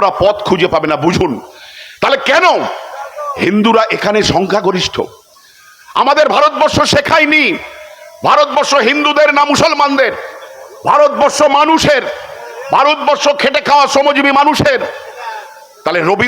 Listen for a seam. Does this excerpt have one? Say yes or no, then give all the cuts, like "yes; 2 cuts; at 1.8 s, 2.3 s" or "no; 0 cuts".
no; 0 cuts